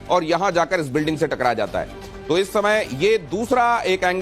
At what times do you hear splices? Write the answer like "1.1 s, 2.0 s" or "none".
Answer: none